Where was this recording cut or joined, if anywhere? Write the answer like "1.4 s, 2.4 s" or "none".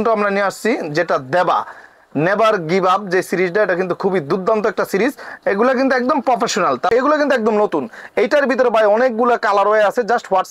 6.9 s